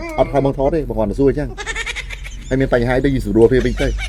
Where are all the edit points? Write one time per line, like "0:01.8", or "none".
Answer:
none